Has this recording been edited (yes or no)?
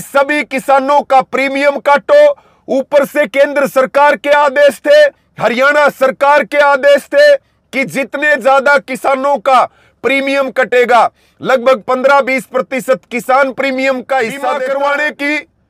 yes